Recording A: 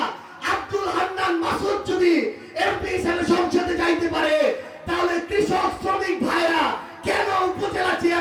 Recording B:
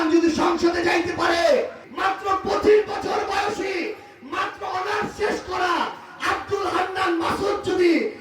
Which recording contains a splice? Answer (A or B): B